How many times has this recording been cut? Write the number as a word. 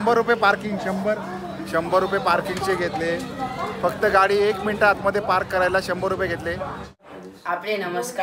one